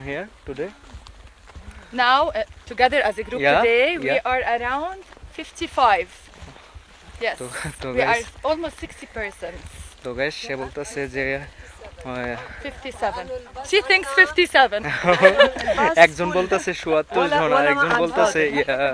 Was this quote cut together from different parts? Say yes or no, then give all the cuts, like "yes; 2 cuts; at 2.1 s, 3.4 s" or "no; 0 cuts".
no; 0 cuts